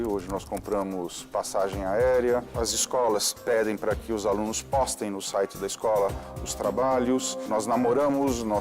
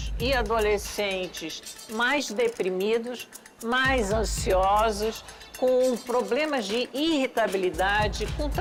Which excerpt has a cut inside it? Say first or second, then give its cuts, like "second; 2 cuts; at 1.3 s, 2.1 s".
first; 2 cuts; at 2.6 s, 7.5 s